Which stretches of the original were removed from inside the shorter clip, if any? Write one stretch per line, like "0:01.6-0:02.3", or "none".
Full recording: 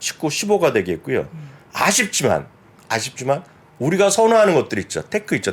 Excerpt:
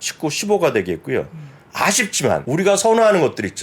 0:02.4-0:03.8